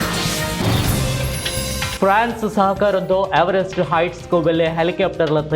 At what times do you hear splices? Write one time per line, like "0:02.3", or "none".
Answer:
0:01.9